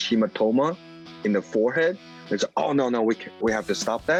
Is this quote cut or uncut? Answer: uncut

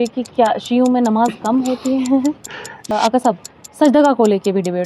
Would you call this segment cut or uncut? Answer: cut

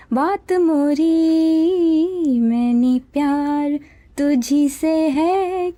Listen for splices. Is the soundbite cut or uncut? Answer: uncut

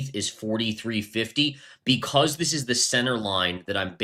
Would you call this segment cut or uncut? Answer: uncut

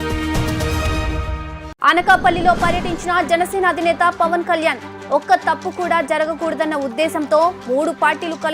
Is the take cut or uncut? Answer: cut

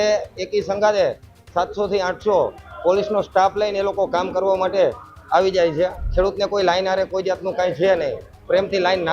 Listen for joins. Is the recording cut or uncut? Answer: cut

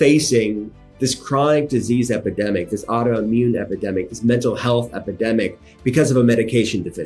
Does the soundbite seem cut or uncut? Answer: uncut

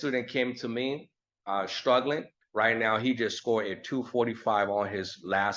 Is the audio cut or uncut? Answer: cut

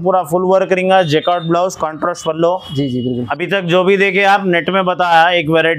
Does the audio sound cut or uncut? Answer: cut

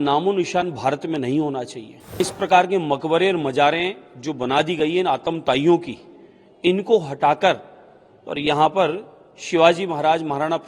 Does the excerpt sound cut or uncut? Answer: cut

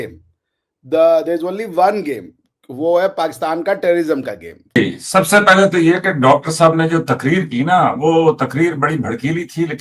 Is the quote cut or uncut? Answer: cut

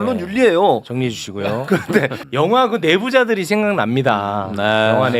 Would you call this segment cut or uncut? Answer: cut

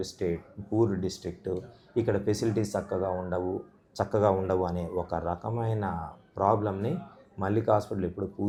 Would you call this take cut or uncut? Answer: uncut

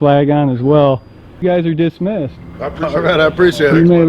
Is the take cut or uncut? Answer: cut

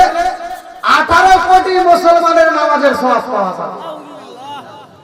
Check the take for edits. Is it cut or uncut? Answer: uncut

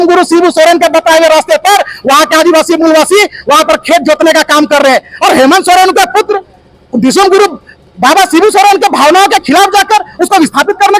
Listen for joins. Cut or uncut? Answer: uncut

